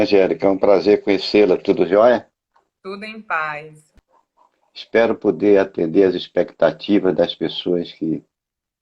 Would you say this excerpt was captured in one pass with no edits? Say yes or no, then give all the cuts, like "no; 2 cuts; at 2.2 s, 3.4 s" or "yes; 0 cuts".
no; 1 cut; at 3.9 s